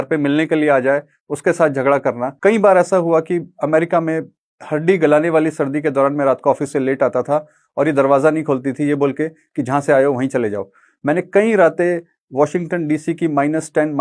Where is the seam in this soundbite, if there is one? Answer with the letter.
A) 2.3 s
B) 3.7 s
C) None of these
A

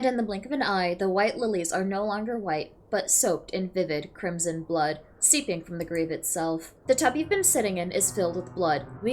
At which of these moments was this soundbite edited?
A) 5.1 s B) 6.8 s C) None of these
B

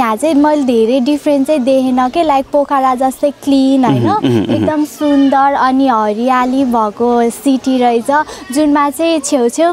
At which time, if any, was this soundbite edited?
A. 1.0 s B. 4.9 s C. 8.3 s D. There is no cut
D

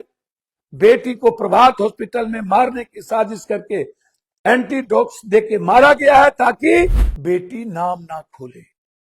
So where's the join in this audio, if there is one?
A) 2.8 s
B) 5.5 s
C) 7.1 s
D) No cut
C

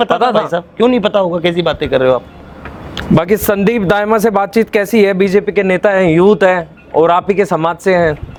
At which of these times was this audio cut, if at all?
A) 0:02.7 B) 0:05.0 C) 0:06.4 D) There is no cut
D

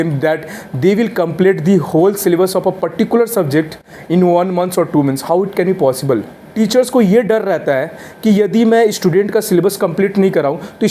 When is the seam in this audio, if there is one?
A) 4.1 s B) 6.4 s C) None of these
B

